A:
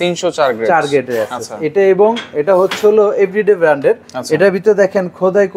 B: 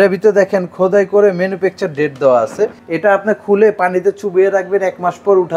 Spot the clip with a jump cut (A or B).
B